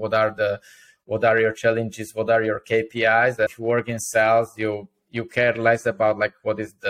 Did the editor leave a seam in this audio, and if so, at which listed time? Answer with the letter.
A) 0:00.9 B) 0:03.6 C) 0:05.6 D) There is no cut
B